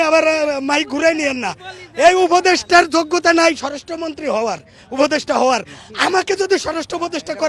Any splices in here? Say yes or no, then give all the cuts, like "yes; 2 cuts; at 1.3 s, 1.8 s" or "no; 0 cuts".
no; 0 cuts